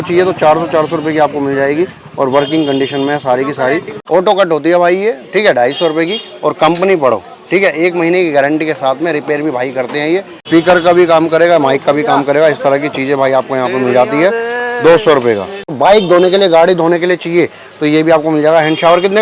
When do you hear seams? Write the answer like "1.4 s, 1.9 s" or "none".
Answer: 3.9 s, 10.4 s, 15.6 s